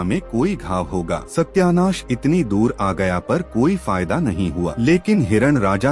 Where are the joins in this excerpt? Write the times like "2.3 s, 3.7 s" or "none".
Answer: 1.3 s, 4.7 s